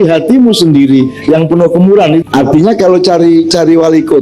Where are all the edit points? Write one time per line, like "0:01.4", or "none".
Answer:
0:02.2